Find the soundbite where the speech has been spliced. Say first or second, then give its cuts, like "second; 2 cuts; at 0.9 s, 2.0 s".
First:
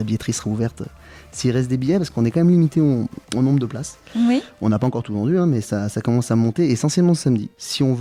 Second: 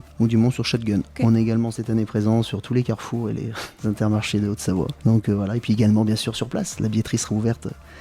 second; 2 cuts; at 3.6 s, 4.9 s